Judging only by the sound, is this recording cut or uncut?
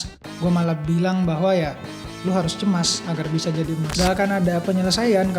cut